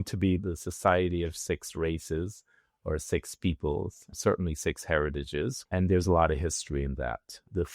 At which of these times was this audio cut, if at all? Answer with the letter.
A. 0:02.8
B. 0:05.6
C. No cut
B